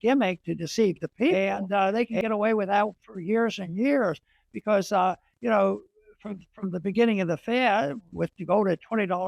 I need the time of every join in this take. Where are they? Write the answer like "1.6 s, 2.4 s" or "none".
1.3 s